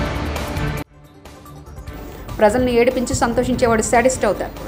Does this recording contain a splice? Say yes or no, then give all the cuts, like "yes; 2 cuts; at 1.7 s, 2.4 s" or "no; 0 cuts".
yes; 1 cut; at 0.9 s